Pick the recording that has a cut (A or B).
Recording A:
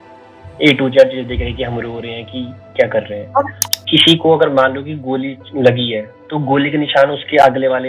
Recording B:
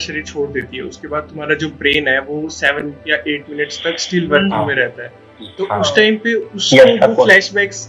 A